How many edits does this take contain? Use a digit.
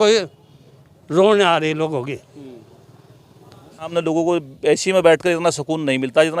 1